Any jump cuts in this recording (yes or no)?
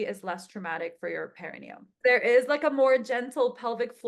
yes